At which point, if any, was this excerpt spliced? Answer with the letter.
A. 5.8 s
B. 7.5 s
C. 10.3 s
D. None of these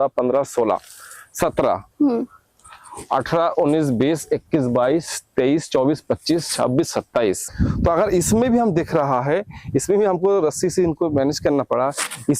B